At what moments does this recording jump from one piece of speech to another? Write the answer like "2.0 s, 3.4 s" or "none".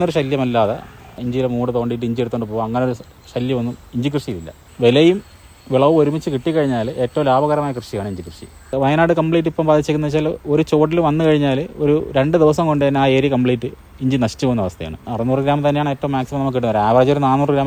1.2 s, 4.6 s, 8.7 s, 15.1 s